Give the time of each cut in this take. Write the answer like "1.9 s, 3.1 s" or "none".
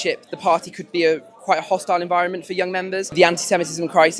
3.1 s